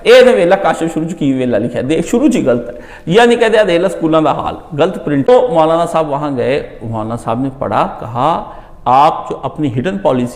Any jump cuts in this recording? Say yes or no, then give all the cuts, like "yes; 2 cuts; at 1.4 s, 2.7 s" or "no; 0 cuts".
yes; 1 cut; at 5.3 s